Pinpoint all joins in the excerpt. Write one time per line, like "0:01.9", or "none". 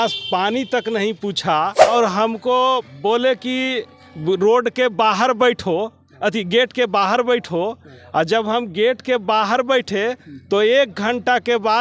0:01.9